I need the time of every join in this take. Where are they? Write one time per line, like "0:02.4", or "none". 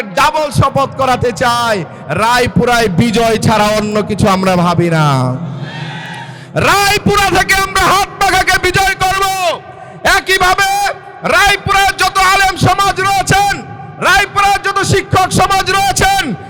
none